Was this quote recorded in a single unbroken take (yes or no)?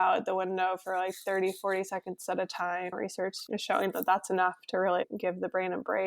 no